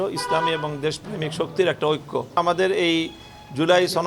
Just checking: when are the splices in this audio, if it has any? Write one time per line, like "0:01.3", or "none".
0:02.4